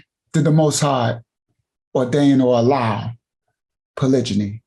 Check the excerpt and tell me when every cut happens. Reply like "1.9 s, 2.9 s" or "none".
none

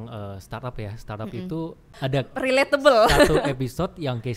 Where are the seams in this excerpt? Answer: 1.9 s

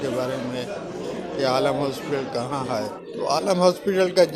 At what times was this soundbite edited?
2.9 s

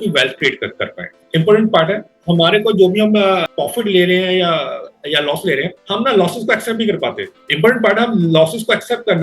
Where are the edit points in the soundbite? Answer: 1.2 s, 2.1 s

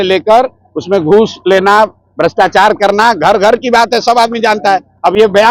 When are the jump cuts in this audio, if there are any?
none

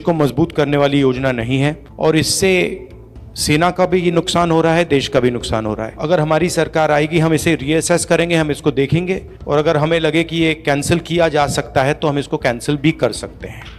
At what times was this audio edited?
none

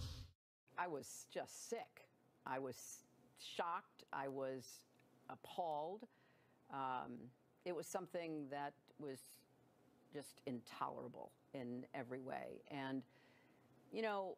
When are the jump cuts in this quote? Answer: 3.2 s

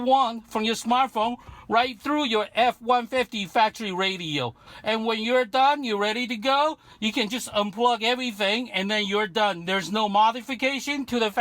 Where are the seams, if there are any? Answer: 4.7 s

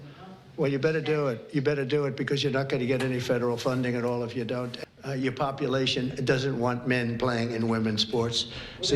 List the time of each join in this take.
4.7 s

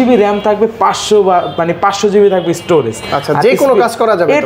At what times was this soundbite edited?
none

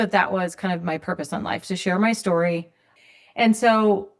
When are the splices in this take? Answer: none

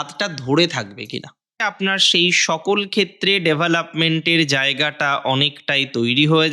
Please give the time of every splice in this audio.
1.6 s

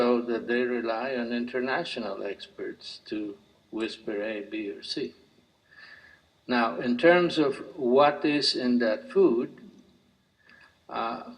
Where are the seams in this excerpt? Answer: 1.1 s

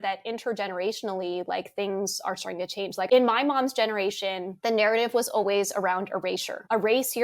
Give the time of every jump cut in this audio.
3.1 s

